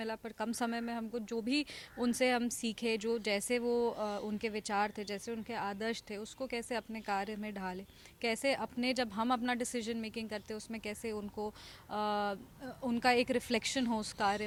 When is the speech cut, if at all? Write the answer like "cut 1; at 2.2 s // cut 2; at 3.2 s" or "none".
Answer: none